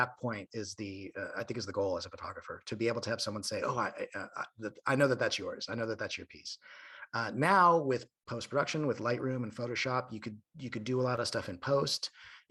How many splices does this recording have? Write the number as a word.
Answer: zero